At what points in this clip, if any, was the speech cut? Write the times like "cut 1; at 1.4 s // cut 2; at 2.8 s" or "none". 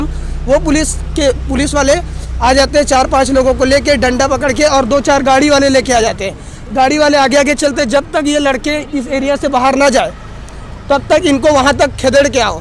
none